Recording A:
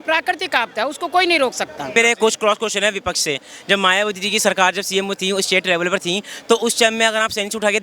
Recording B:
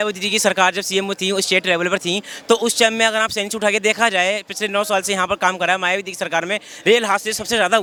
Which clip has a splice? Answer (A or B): A